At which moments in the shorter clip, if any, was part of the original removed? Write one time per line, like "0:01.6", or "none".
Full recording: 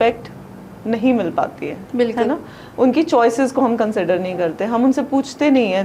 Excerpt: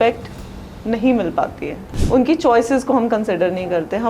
0:01.8